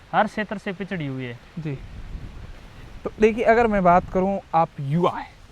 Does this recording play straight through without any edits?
yes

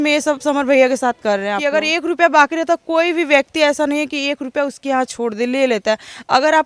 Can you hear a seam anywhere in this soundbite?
yes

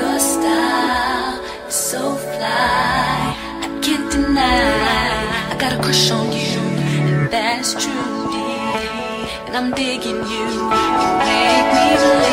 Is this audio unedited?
yes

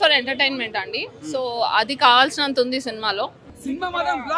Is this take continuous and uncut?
no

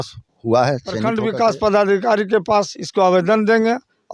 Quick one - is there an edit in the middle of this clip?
yes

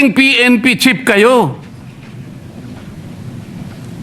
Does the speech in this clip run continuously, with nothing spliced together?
yes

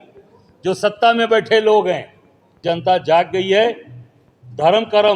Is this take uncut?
no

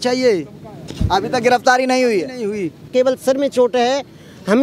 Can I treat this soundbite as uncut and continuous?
no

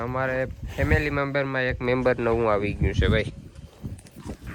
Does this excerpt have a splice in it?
no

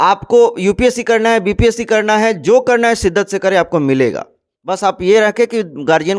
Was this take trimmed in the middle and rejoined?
no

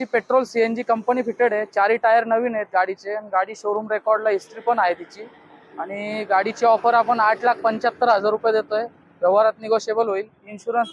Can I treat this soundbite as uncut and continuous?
yes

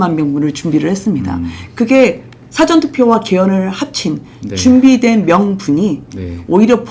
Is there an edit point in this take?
no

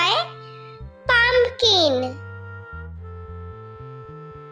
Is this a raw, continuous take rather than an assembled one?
yes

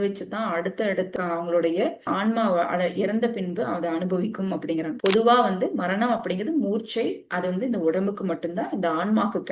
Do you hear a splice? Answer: yes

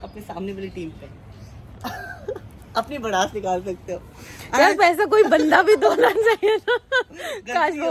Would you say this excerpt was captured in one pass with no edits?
yes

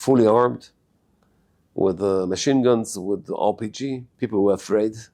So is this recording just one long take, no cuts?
no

